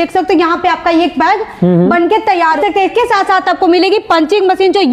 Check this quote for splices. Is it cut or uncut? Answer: cut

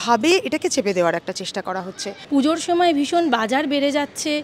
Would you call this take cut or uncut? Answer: cut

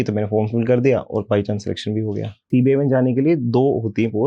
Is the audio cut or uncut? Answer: cut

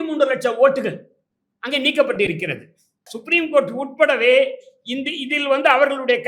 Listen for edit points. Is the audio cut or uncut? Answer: cut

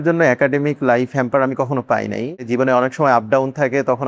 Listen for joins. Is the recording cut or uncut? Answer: cut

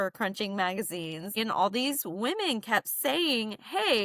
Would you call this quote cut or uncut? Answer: cut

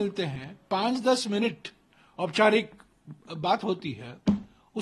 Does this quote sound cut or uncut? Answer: uncut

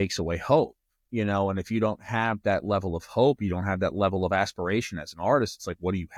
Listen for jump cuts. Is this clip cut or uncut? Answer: uncut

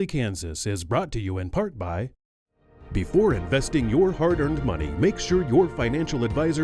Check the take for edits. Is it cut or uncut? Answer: cut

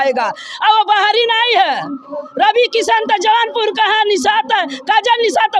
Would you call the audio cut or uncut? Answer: uncut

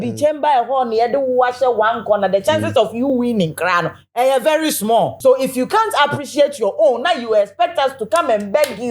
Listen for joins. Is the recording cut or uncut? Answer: cut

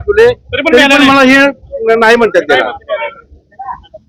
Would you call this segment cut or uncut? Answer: uncut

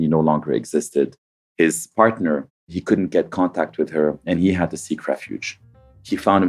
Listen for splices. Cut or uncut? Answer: cut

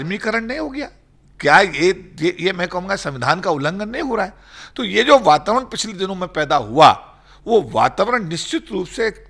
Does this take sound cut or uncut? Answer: uncut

